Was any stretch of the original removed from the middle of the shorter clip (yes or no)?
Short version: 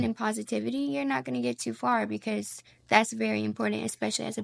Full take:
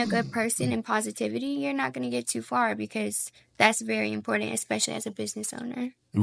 no